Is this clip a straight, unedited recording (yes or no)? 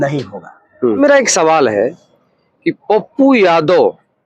no